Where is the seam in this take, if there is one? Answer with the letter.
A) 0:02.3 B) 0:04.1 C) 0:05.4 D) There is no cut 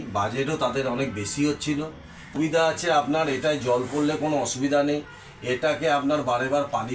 A